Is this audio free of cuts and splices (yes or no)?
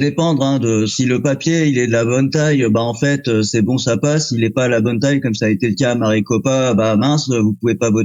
yes